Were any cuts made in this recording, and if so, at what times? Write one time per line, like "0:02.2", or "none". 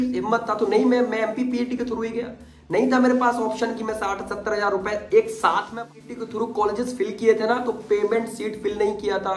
0:05.9